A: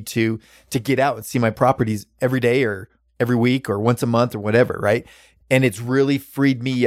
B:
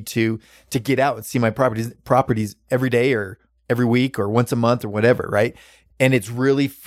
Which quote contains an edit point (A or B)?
A